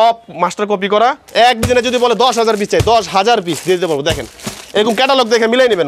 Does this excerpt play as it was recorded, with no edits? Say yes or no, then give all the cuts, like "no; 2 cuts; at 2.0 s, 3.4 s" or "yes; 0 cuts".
no; 1 cut; at 1.2 s